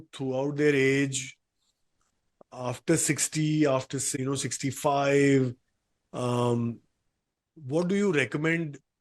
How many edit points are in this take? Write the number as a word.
one